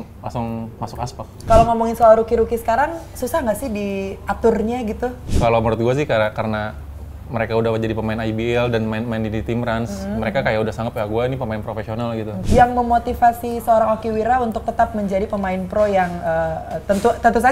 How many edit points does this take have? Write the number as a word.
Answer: three